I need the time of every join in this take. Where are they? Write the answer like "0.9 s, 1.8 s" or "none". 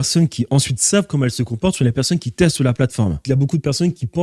3.2 s